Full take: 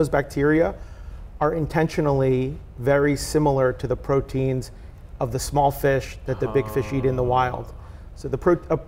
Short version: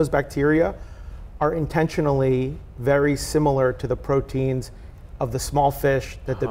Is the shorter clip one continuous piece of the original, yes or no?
yes